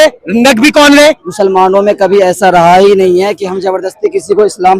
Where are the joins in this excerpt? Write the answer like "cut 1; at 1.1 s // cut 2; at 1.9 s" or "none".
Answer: cut 1; at 1.3 s